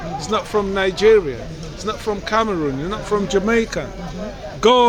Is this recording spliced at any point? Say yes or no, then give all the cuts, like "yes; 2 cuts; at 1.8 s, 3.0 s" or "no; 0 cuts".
no; 0 cuts